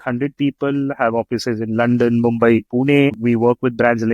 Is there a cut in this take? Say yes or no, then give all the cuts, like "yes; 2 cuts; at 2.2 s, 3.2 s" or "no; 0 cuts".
yes; 1 cut; at 3.2 s